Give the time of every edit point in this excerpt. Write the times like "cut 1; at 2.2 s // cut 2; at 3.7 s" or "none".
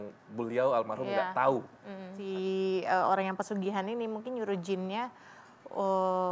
cut 1; at 2.2 s